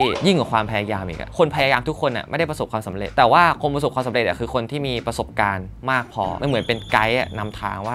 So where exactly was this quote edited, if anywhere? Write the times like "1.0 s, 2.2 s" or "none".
none